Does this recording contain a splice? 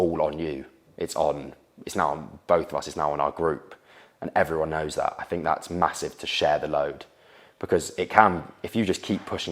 no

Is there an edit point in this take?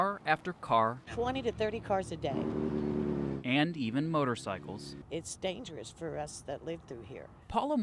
no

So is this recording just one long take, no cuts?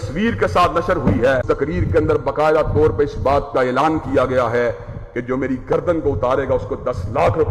no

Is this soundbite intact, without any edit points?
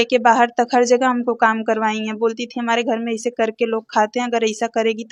yes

